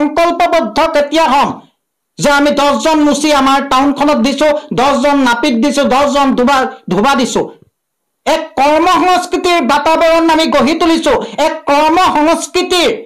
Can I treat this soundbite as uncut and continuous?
yes; 0 cuts

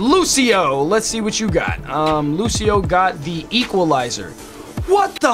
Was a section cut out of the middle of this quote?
no; 0 cuts

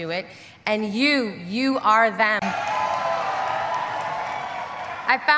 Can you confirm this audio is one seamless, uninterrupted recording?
no; 1 cut; at 2.4 s

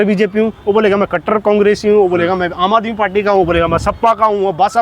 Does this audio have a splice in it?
no; 0 cuts

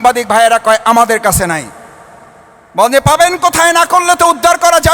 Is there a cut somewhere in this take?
no; 0 cuts

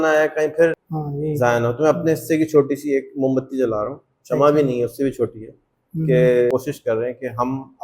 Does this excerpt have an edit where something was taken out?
yes; 1 cut; at 6.5 s

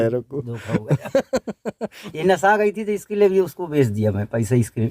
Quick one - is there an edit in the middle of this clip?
yes; 1 cut; at 2.2 s

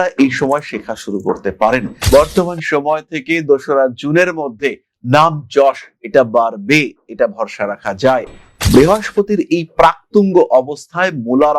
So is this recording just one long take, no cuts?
no; 2 cuts; at 2.0 s, 8.4 s

